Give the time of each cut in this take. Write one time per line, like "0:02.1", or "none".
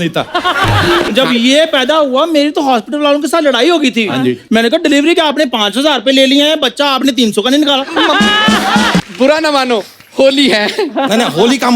0:01.1
0:09.0